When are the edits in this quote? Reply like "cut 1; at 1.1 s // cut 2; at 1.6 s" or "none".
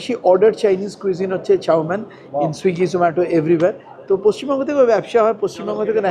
none